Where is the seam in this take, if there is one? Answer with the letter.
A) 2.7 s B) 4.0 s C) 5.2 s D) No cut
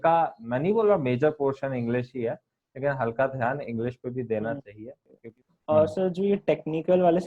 C